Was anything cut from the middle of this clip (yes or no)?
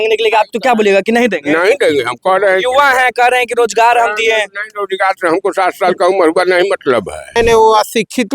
yes